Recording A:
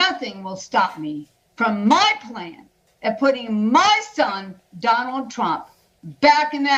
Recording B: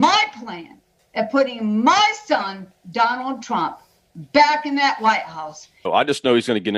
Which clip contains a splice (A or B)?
B